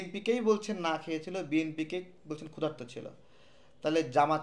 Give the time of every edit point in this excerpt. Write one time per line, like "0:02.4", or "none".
none